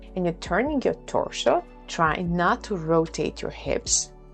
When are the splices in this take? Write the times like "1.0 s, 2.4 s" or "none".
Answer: 1.7 s

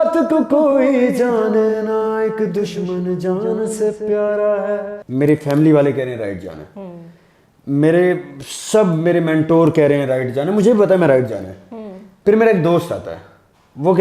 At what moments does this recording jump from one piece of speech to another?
5.0 s

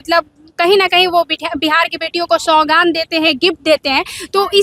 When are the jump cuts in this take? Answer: none

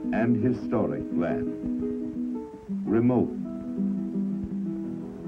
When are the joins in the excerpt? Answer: 3.7 s

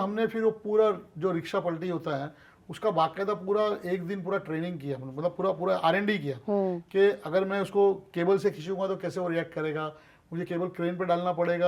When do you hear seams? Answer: none

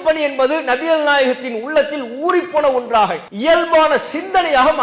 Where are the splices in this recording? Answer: 3.3 s

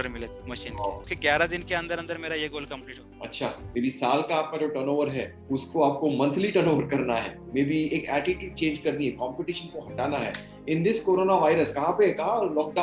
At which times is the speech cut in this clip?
1.1 s, 3.6 s

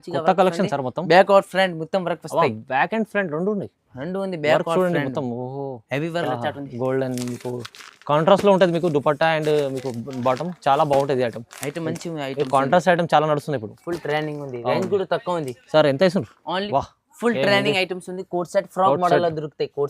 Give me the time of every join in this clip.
6.1 s, 16.6 s

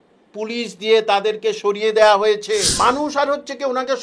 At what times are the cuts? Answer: 2.7 s

